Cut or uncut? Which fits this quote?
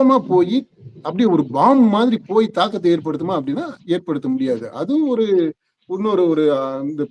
uncut